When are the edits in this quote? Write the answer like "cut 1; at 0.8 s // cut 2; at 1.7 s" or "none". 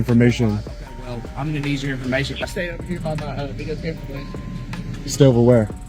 cut 1; at 2.4 s